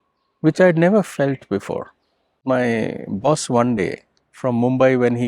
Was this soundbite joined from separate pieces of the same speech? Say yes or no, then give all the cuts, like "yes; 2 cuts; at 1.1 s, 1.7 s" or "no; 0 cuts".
yes; 1 cut; at 2.4 s